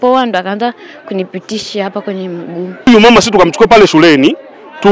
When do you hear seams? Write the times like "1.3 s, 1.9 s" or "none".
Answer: 2.9 s